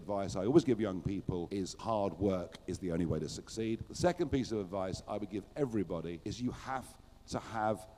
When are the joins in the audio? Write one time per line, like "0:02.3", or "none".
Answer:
0:01.7
0:03.9